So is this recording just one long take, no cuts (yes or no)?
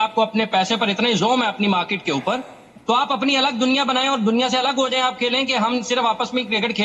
yes